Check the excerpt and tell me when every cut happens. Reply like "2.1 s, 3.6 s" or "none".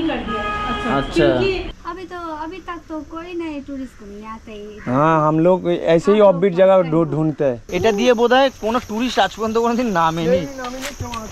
1.7 s, 7.7 s